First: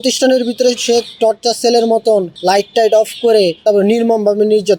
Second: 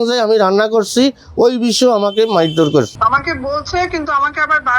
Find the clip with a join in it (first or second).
second